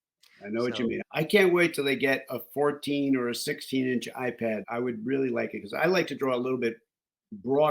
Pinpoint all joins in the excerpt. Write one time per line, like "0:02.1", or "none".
0:01.0
0:04.6